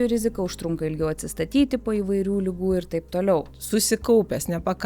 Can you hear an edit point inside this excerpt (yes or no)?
yes